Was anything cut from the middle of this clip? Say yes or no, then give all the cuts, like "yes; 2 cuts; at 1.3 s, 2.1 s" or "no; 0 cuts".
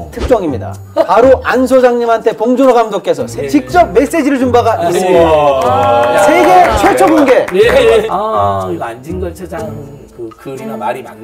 yes; 2 cuts; at 8.1 s, 10.0 s